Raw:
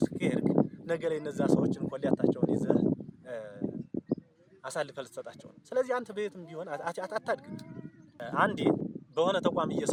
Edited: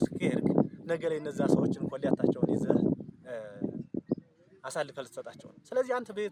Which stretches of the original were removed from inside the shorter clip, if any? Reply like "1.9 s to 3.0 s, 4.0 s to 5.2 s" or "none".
none